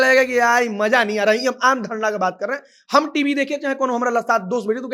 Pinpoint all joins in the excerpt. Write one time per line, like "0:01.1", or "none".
none